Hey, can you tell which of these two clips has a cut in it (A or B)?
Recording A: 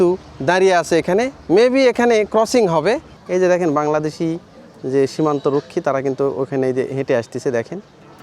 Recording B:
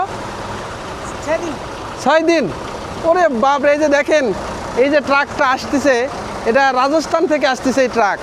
A